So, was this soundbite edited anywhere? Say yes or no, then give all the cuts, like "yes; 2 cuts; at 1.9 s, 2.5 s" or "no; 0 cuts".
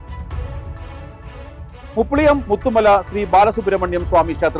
yes; 1 cut; at 1.7 s